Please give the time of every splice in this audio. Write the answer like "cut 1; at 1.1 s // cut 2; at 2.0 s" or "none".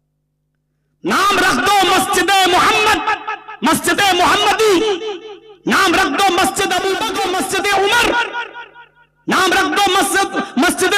cut 1; at 7.1 s